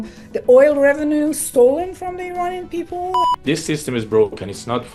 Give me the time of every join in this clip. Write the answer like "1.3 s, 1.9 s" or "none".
3.2 s